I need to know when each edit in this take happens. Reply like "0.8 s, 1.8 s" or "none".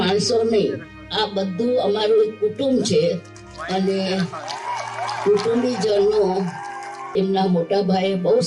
7.1 s